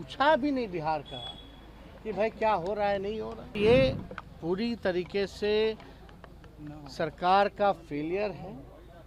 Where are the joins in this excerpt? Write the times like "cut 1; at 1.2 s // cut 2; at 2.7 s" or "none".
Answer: cut 1; at 3.6 s